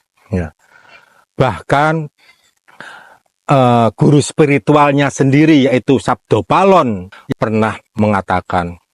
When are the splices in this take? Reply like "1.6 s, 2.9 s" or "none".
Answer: 7.1 s

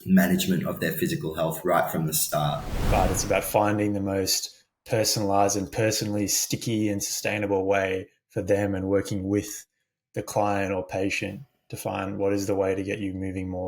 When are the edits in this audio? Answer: 2.7 s

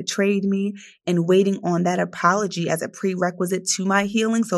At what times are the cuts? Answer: none

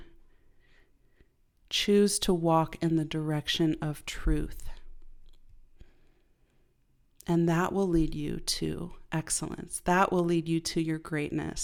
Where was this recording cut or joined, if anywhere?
none

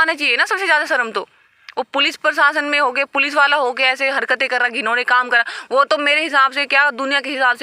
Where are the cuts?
none

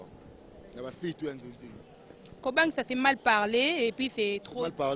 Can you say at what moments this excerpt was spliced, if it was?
none

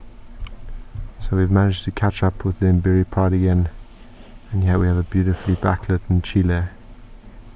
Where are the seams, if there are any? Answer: none

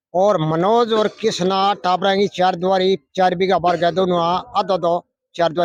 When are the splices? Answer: none

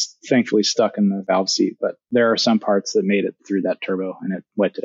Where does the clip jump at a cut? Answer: 2.0 s, 3.4 s

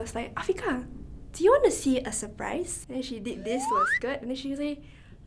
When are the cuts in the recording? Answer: 2.8 s

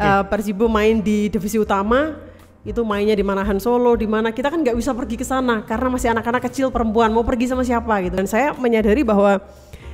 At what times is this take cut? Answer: 8.2 s

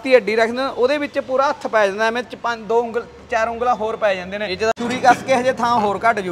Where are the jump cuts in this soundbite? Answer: 4.8 s

